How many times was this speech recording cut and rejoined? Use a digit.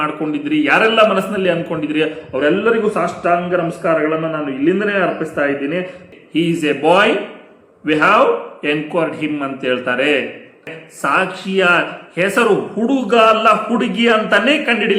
2